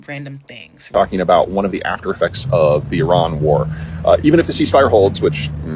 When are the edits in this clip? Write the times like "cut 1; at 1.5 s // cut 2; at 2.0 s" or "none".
cut 1; at 0.9 s